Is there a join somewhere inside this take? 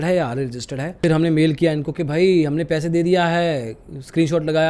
yes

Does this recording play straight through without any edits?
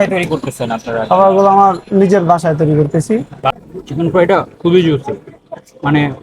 no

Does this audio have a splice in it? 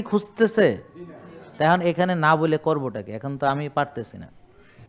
no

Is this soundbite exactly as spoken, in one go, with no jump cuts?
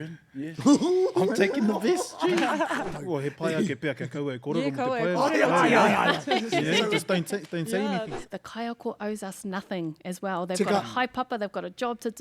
no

